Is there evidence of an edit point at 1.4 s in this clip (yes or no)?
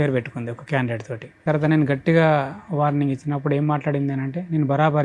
yes